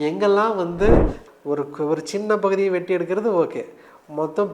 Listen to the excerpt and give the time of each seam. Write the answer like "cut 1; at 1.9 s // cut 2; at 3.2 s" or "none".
cut 1; at 1.2 s